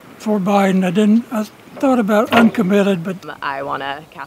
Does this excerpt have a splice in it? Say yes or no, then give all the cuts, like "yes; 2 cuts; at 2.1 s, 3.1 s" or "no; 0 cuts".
yes; 1 cut; at 3.3 s